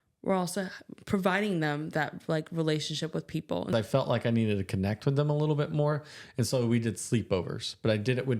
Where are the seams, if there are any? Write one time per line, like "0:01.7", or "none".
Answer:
0:03.7